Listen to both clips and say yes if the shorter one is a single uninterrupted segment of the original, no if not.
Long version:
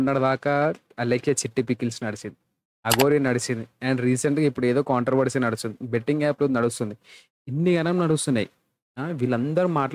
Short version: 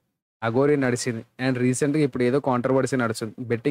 yes